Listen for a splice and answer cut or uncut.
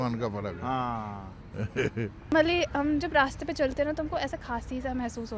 cut